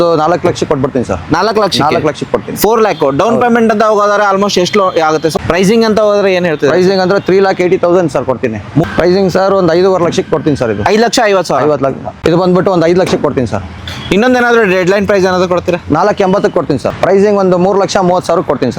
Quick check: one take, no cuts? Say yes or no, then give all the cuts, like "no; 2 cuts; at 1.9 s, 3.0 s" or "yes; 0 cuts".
no; 4 cuts; at 5.3 s, 8.8 s, 12.1 s, 16.9 s